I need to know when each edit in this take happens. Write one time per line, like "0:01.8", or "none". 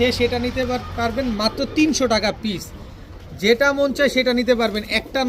none